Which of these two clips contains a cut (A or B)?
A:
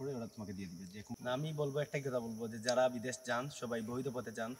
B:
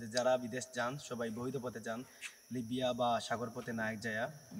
A